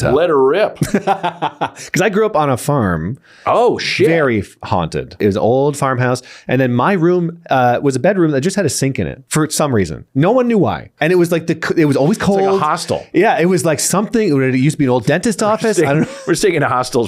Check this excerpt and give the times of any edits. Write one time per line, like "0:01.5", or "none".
0:05.2
0:09.2
0:10.9